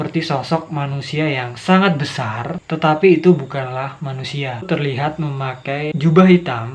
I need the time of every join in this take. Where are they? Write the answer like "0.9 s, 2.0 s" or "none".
4.7 s, 5.9 s